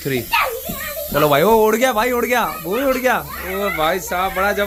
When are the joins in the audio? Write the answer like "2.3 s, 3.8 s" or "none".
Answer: none